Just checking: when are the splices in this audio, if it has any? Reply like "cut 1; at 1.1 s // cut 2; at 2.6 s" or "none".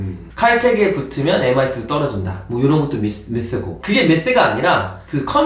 cut 1; at 3.7 s